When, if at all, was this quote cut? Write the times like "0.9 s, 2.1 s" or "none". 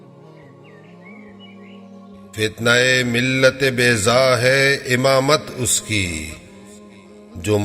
2.3 s